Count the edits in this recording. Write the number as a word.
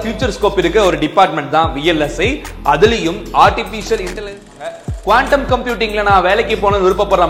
one